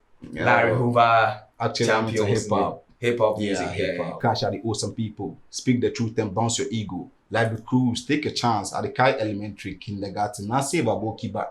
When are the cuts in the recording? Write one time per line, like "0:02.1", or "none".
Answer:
0:04.2